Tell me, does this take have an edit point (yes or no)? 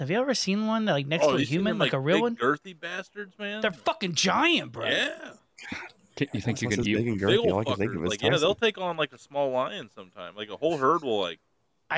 no